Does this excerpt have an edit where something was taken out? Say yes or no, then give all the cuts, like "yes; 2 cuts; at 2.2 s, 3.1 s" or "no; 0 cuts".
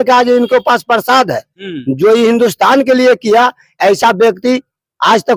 no; 0 cuts